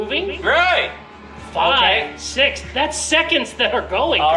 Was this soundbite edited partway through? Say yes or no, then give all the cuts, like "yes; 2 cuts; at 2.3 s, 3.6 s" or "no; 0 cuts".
no; 0 cuts